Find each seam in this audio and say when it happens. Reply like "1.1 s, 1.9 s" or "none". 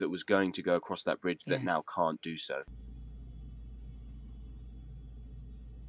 2.7 s